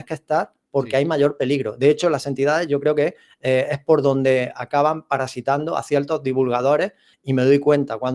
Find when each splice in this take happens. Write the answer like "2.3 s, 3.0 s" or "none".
7.1 s